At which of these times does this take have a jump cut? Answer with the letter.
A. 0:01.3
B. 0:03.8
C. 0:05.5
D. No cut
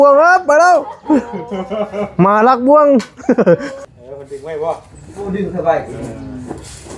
B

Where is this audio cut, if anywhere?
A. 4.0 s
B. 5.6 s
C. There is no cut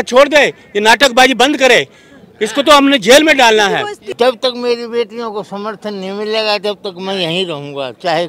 A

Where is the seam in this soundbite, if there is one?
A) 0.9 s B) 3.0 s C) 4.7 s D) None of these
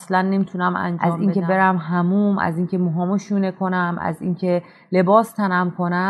A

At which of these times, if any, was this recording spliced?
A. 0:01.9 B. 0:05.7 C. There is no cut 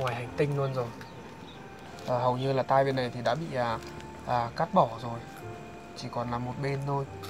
A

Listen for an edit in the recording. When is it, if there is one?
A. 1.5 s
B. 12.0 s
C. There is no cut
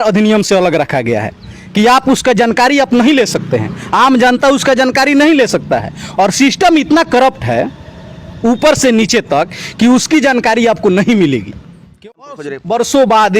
B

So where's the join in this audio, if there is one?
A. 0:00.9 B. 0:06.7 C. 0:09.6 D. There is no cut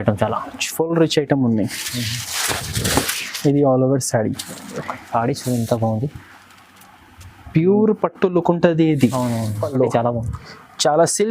C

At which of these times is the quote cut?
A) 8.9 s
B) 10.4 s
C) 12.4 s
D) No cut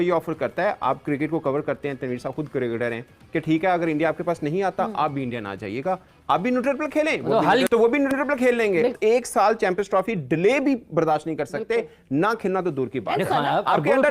A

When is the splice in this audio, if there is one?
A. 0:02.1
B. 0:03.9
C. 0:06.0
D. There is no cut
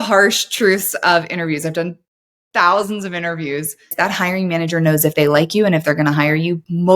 B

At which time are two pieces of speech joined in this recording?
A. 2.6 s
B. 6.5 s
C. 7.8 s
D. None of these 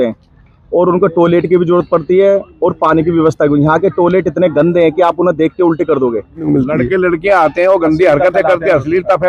B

